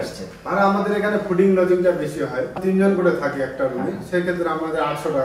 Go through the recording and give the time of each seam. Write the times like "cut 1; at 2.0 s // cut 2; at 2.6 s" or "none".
cut 1; at 2.6 s